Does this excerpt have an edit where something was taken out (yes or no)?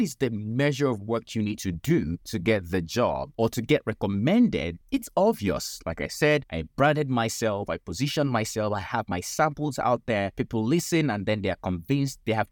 yes